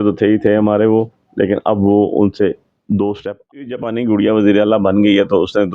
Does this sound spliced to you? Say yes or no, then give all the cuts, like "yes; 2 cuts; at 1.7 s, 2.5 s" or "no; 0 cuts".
yes; 1 cut; at 3.9 s